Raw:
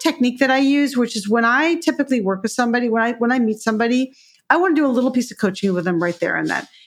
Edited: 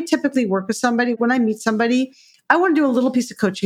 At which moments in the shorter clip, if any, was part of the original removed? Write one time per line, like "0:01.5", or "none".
0:01.1